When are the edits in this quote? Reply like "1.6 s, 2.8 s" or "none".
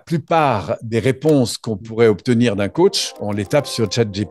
none